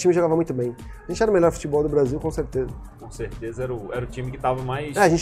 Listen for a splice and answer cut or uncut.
uncut